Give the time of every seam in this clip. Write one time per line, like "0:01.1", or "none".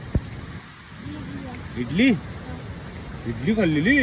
none